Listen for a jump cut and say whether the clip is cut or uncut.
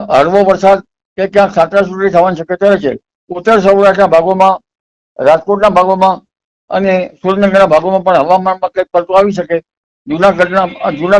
uncut